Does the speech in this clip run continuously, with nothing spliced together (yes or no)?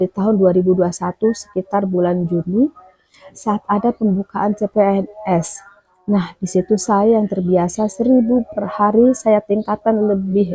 yes